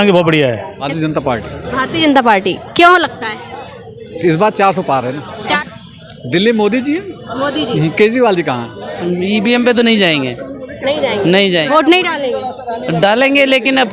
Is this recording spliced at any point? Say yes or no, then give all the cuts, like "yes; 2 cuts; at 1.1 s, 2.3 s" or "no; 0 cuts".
yes; 3 cuts; at 0.9 s, 5.6 s, 8.9 s